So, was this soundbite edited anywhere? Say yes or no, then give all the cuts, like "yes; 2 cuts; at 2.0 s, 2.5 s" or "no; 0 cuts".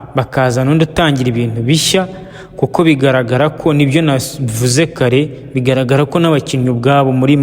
no; 0 cuts